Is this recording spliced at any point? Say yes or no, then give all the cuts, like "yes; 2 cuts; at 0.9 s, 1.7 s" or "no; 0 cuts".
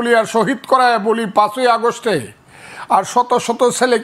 no; 0 cuts